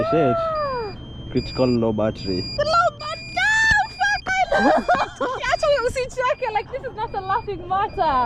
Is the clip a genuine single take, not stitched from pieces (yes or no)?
yes